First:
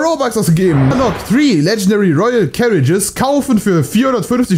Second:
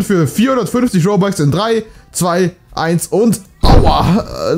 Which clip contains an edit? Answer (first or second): first